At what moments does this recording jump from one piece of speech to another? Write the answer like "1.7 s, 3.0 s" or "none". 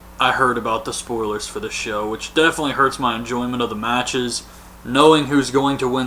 3.8 s